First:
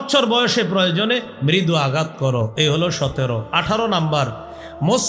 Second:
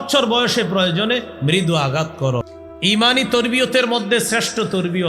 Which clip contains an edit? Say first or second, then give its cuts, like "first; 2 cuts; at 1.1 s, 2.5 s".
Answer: second; 1 cut; at 2.5 s